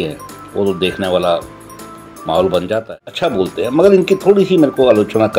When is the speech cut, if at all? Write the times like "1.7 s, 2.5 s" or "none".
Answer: 3.0 s